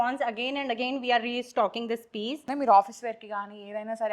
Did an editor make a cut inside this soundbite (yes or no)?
yes